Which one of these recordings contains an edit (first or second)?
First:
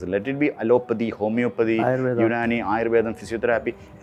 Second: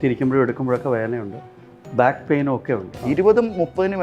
second